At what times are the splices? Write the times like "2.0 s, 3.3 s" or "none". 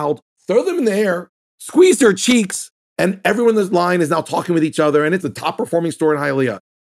2.8 s, 5.2 s

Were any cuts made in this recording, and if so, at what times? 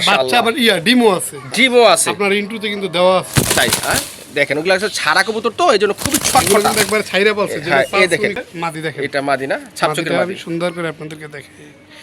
8.5 s

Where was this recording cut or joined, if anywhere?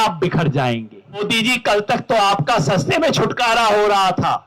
1.2 s

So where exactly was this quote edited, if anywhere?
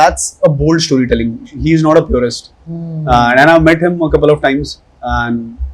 none

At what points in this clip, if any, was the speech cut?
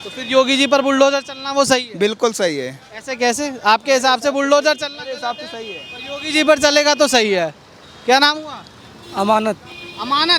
none

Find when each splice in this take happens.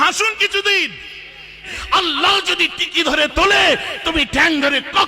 1.6 s

